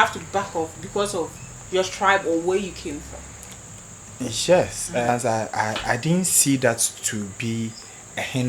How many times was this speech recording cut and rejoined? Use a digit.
1